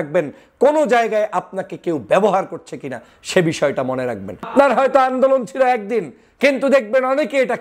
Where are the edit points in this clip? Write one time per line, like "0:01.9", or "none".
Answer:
0:04.5